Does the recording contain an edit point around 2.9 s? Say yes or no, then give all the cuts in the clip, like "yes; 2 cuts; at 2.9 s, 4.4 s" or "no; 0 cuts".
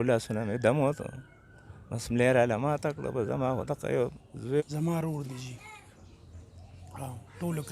no; 1 cut; at 4.6 s